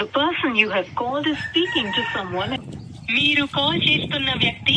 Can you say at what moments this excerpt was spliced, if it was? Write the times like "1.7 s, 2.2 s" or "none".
2.6 s

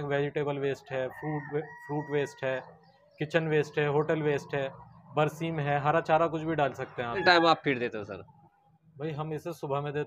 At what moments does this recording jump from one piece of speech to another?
7.2 s

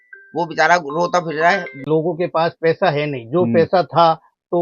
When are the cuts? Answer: 1.8 s

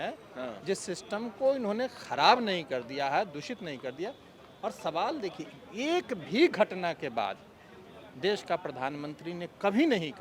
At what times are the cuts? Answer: none

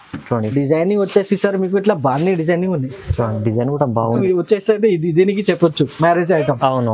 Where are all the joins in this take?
4.2 s

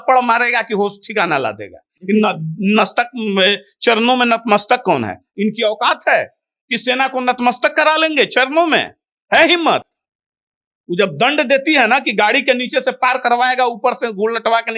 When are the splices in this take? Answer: none

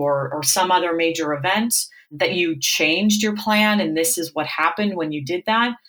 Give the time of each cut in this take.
none

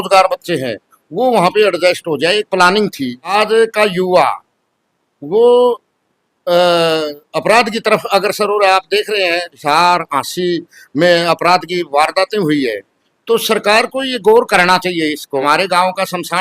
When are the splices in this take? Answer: 3.3 s, 9.5 s, 15.4 s

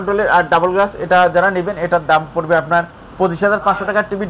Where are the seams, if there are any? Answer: none

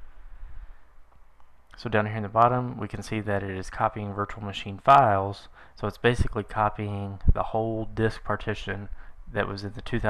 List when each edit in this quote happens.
none

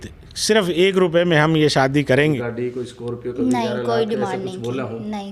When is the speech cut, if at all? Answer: 2.5 s

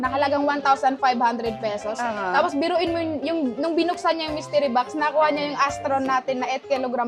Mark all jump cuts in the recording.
none

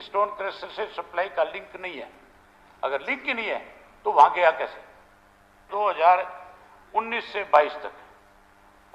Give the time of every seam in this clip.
5.6 s

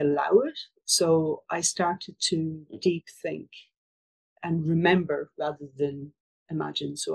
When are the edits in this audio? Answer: none

